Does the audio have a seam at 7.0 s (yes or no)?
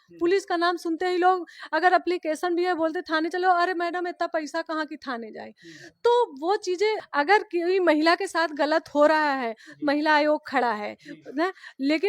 yes